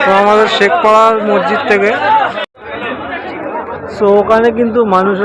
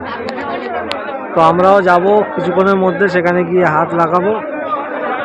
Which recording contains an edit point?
first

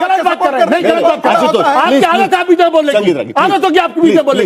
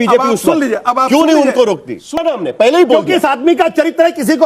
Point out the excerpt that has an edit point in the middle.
second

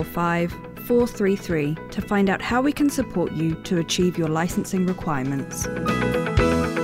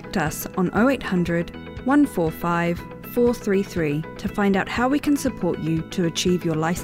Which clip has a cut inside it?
first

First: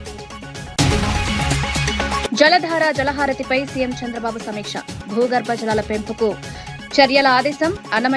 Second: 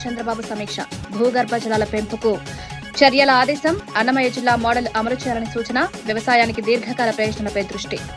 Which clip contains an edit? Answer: first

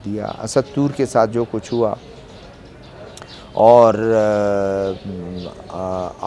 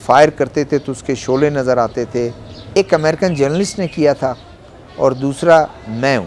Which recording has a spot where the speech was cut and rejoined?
second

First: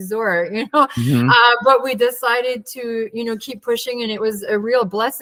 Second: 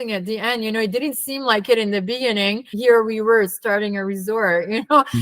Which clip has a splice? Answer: second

